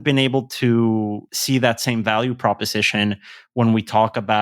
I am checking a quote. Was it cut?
yes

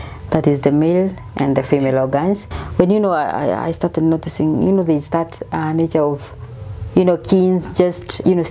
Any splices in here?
yes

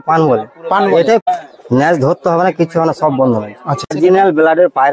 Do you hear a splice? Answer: yes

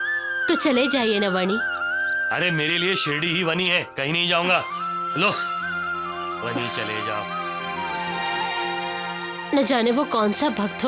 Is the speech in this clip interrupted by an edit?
no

